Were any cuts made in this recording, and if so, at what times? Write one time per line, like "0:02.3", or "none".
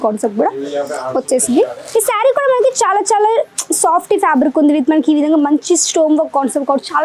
0:01.8